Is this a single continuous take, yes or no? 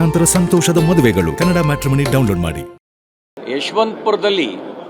no